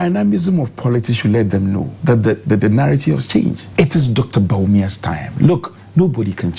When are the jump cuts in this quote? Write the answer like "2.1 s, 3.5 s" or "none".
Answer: none